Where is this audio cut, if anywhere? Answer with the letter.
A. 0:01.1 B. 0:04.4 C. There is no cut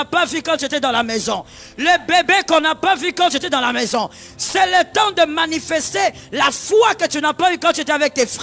C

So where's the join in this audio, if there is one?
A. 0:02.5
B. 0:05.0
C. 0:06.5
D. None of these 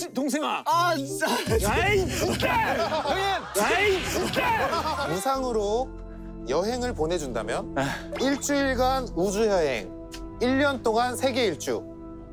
B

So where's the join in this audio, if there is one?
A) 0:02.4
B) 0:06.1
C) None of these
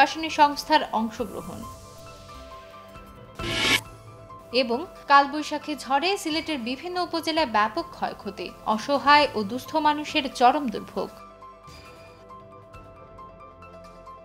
C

